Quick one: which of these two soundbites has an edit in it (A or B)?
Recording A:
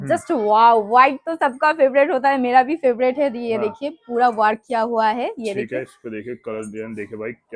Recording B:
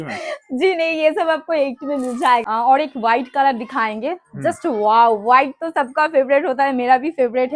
B